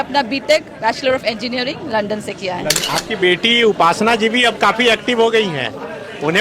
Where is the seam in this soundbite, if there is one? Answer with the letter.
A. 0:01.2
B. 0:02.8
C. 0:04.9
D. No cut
B